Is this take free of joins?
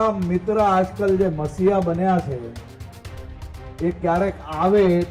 yes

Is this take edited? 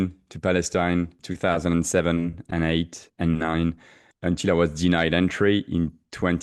yes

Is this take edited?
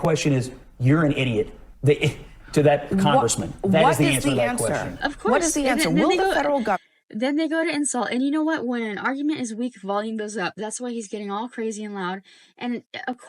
no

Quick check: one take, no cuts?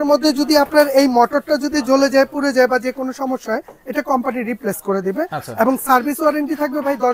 yes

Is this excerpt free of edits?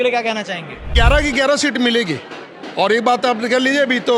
no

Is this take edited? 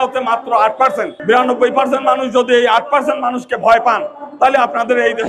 yes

